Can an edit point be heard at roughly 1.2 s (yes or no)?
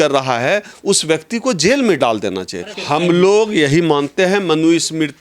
no